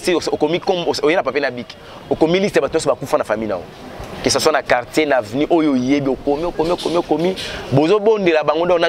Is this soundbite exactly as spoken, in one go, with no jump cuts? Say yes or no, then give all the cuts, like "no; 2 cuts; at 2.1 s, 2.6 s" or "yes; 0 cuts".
yes; 0 cuts